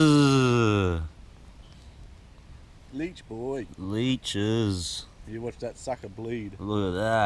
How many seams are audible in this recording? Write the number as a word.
zero